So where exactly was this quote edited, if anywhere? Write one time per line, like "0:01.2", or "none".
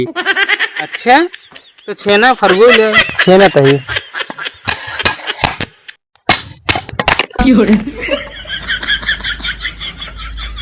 0:07.3